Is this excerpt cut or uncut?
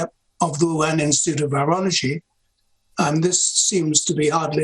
uncut